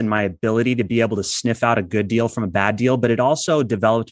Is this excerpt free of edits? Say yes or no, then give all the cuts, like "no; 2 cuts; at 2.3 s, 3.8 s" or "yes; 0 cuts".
yes; 0 cuts